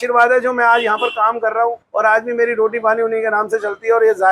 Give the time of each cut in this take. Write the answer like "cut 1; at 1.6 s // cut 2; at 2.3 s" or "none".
cut 1; at 1.8 s